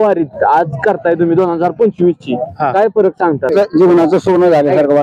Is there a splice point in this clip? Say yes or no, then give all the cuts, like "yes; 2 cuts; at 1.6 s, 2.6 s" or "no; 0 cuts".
yes; 1 cut; at 3.5 s